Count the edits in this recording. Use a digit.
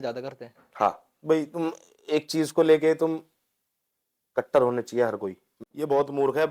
1